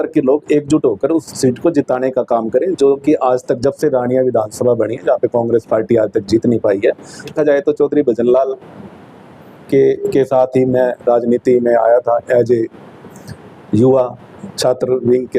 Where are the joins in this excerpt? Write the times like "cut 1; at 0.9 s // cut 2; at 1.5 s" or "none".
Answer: cut 1; at 7.3 s